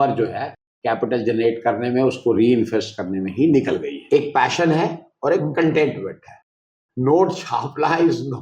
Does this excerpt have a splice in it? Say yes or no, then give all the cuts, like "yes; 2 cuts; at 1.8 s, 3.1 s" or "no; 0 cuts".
yes; 1 cut; at 4.0 s